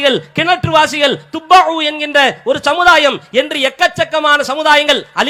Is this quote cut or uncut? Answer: uncut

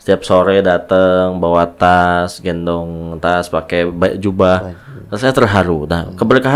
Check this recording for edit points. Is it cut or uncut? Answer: uncut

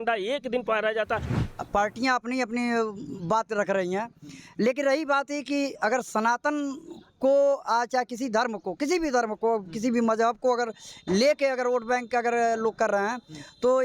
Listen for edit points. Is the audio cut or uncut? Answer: cut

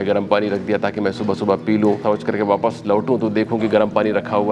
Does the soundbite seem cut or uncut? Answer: cut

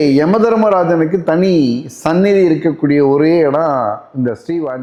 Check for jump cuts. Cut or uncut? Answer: uncut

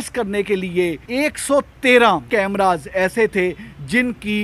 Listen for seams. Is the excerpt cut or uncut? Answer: cut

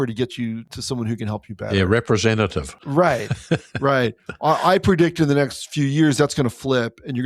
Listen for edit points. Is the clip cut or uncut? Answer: uncut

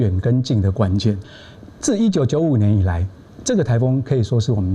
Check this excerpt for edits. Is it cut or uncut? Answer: cut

